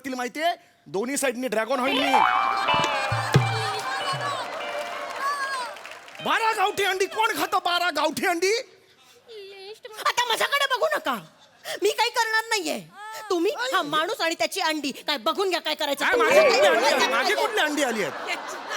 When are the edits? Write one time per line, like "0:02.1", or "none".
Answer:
none